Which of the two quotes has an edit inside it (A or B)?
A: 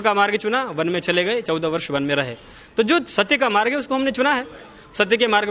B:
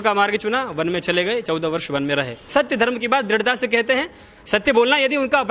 B